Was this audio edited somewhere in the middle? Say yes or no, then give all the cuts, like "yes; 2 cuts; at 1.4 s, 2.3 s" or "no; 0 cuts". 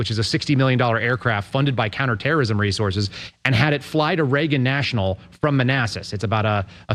no; 0 cuts